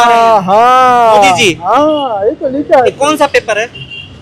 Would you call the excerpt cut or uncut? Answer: uncut